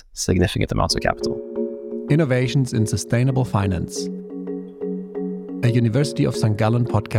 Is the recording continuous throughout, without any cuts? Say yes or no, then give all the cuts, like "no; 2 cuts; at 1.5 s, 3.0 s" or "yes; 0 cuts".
no; 1 cut; at 1.6 s